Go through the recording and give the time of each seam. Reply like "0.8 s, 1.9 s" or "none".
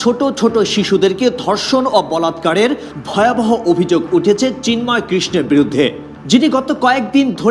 none